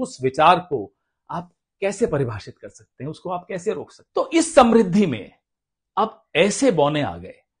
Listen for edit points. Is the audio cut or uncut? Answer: cut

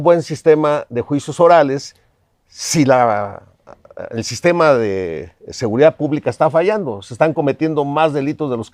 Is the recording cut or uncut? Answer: uncut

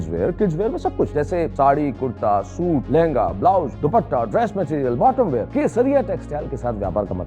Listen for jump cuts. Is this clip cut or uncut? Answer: cut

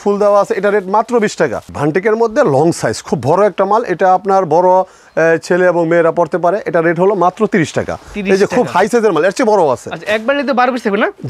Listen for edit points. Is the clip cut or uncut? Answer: uncut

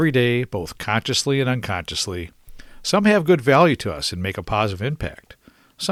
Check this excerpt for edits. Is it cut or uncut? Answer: uncut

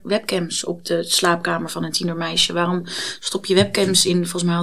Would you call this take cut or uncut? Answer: uncut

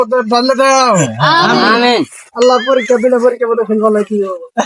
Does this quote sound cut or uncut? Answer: uncut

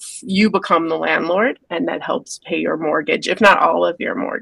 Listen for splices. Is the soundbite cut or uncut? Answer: cut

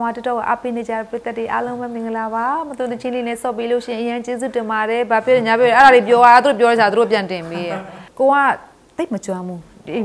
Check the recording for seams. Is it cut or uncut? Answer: cut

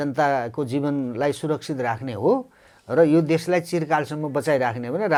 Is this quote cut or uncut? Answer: uncut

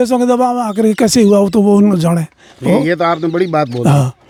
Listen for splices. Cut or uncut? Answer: uncut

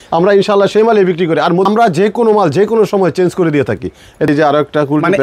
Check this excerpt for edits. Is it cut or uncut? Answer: cut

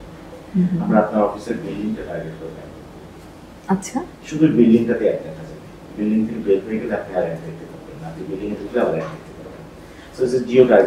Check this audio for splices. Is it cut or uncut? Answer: uncut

